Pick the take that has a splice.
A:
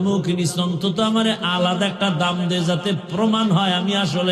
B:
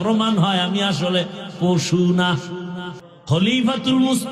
B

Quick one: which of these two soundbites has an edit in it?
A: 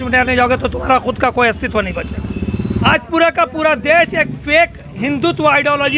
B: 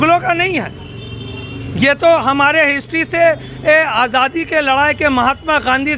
A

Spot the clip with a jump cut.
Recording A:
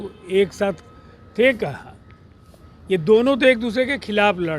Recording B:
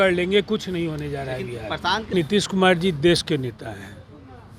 B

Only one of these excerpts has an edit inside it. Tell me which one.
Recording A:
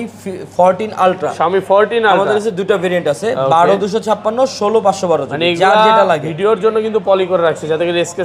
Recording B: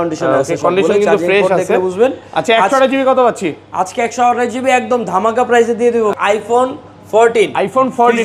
B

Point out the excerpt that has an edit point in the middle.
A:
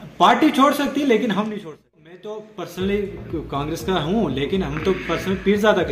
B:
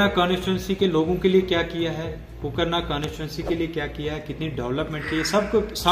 A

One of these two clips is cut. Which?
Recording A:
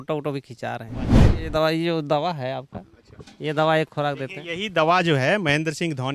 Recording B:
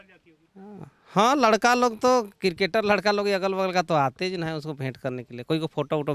A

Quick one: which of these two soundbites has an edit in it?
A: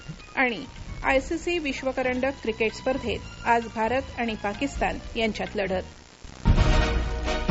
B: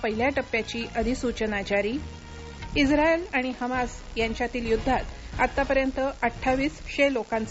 A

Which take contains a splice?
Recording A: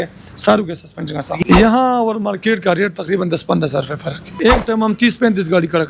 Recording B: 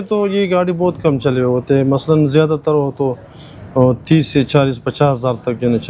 A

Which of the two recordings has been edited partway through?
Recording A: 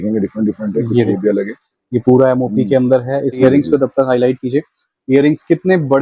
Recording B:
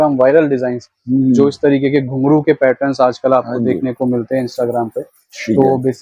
A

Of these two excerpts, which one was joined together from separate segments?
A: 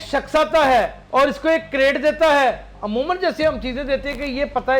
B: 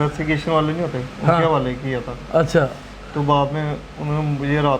A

